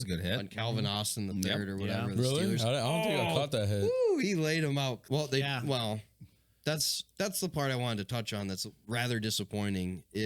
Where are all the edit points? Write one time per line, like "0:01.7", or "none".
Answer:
0:05.0

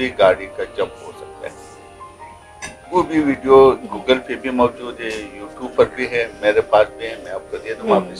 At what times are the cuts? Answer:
none

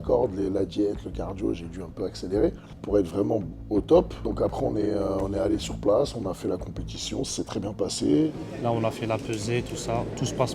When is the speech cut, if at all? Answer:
0:02.7
0:04.2
0:08.3

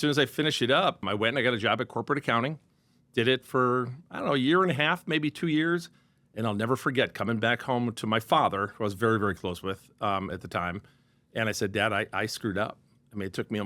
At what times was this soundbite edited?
0:01.0

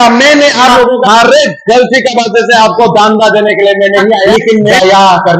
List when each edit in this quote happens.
0:01.0
0:04.5

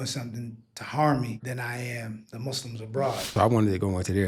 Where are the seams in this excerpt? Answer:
0:01.7
0:03.3

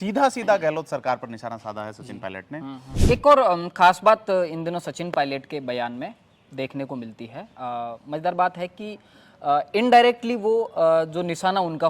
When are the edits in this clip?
0:03.0

